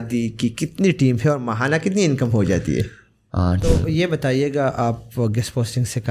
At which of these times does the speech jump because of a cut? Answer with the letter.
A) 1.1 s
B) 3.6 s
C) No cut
B